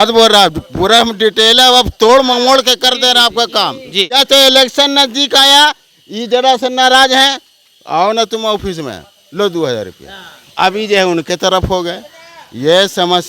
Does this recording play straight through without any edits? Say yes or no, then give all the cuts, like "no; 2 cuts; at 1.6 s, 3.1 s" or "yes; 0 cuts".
no; 1 cut; at 4.1 s